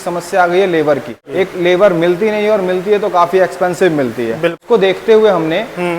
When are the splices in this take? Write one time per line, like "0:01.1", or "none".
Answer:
0:01.2
0:04.6